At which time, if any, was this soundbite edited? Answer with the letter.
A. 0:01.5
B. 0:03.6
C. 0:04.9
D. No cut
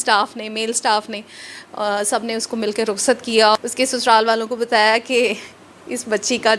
B